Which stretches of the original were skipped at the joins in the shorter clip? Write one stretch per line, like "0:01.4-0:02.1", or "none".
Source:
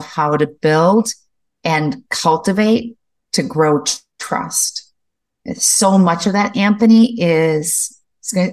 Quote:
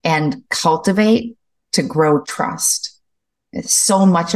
0:03.9-0:04.2